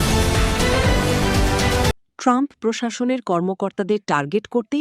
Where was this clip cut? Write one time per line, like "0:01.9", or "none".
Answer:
0:01.8